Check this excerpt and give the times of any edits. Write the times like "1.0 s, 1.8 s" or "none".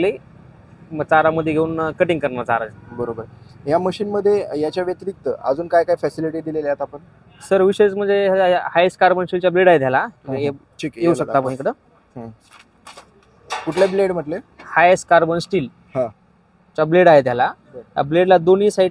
none